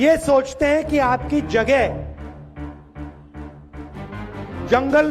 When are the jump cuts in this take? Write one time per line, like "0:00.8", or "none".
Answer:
0:01.9
0:04.1